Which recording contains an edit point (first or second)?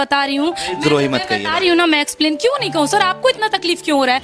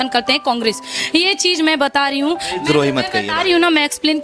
second